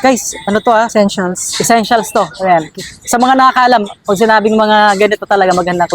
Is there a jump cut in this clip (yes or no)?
no